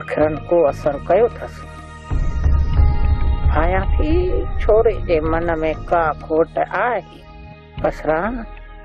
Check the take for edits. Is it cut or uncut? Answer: cut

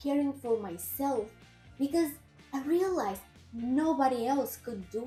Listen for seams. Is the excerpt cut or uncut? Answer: uncut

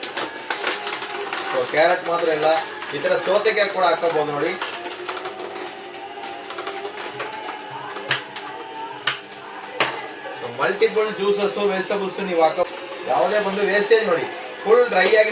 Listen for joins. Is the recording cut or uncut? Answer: uncut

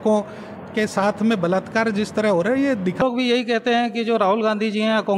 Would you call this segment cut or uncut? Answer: cut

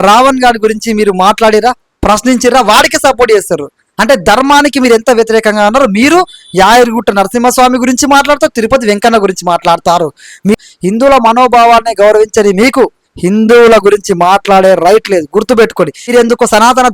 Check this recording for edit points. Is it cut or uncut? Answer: cut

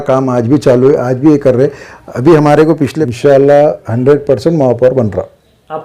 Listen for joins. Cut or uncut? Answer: cut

